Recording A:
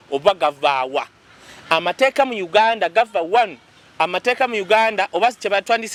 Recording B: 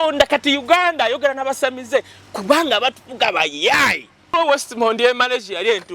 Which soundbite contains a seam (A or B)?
B